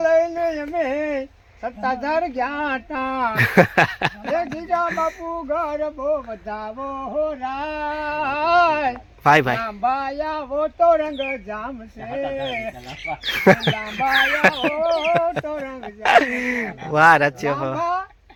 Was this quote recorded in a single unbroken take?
yes; 0 cuts

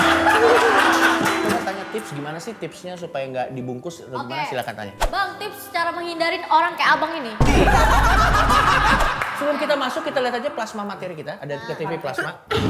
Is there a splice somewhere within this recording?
yes; 2 cuts; at 1.6 s, 9.1 s

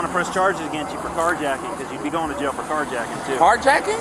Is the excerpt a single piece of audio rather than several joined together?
yes; 0 cuts

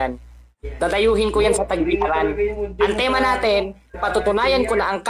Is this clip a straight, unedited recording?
no; 1 cut; at 2.6 s

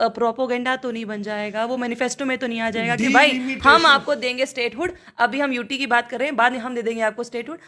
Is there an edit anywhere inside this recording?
no; 0 cuts

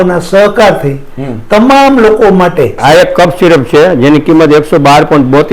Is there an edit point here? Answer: yes; 1 cut; at 2.8 s

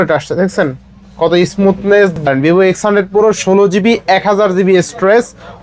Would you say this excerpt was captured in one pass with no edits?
no; 1 cut; at 2.2 s

